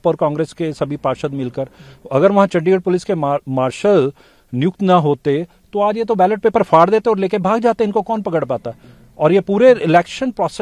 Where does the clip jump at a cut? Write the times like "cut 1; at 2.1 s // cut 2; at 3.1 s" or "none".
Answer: none

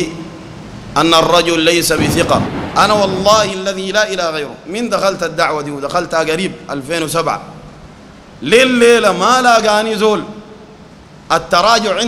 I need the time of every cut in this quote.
cut 1; at 2.6 s

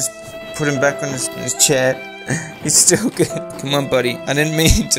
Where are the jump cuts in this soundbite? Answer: cut 1; at 1.1 s

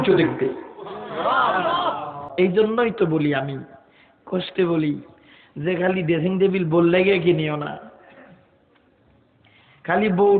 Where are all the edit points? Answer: cut 1; at 2.2 s

